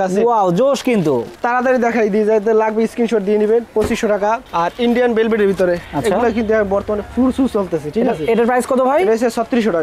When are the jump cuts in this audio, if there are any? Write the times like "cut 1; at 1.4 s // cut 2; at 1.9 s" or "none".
none